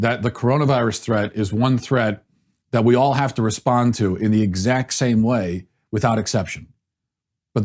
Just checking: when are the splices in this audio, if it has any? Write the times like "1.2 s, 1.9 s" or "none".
none